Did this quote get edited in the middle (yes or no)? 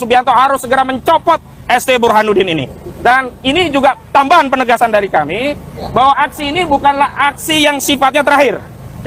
no